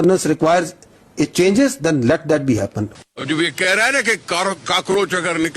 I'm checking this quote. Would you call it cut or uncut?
cut